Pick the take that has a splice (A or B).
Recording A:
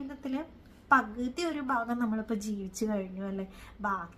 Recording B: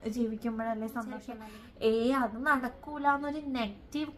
B